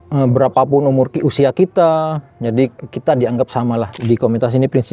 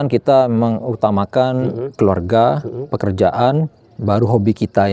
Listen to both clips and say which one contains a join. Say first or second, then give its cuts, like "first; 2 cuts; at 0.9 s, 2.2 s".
first; 1 cut; at 3.9 s